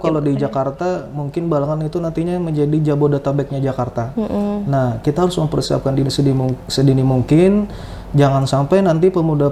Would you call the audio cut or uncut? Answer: uncut